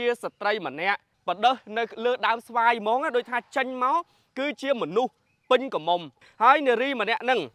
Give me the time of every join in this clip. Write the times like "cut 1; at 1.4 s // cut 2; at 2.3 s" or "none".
cut 1; at 1.1 s // cut 2; at 6.2 s